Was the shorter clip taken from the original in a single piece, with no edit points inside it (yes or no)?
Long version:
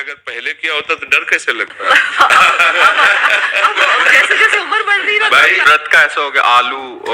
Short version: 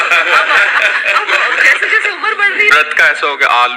no